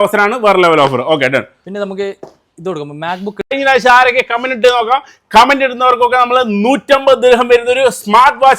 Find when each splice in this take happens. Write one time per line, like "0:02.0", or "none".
0:03.5